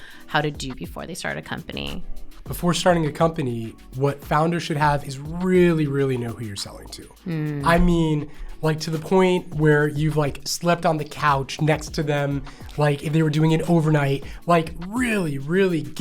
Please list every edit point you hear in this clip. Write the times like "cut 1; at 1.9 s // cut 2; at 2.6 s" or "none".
cut 1; at 2.3 s // cut 2; at 5.1 s